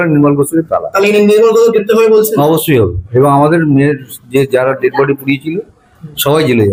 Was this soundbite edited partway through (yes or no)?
no